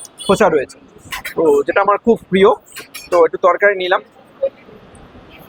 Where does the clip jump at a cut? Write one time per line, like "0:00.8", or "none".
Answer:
none